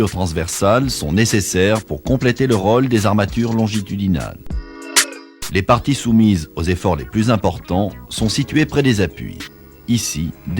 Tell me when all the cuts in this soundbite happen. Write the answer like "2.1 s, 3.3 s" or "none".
4.9 s